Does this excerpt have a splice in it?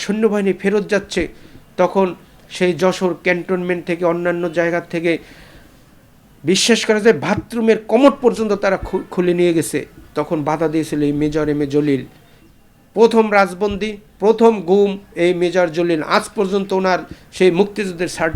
no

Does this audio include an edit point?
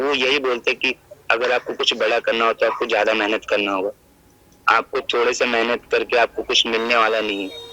no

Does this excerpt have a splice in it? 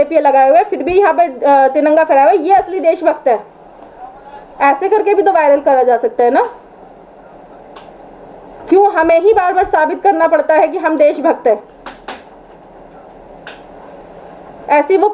no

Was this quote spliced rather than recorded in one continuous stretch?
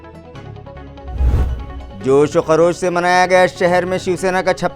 yes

